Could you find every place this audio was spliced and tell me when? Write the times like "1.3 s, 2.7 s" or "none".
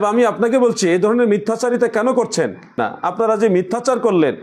2.8 s